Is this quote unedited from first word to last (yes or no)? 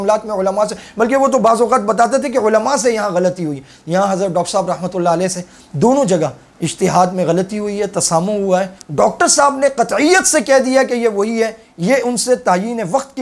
no